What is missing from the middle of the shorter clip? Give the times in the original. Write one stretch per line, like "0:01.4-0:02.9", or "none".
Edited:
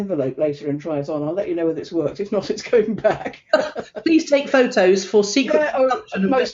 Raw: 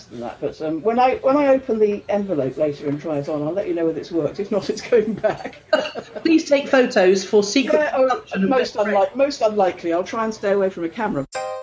none